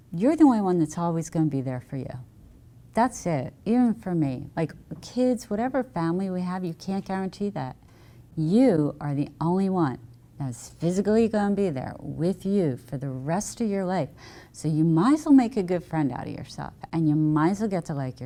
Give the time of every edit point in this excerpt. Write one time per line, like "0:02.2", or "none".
none